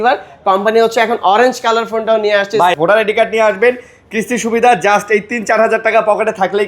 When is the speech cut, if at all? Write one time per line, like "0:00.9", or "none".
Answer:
0:02.7